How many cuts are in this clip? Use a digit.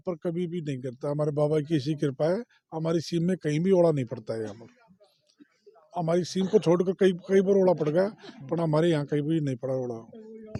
0